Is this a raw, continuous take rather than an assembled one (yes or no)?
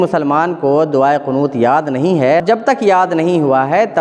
no